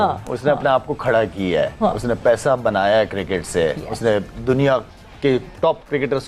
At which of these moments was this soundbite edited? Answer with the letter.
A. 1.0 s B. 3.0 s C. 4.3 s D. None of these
D